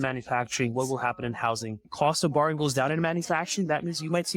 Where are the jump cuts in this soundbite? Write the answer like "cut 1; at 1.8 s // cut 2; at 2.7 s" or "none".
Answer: cut 1; at 1.9 s